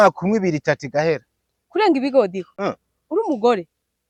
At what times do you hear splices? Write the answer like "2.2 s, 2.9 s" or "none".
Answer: none